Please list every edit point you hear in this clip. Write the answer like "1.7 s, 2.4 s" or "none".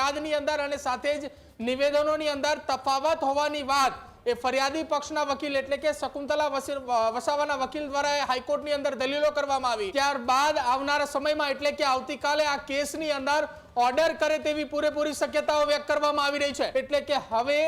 9.9 s, 16.7 s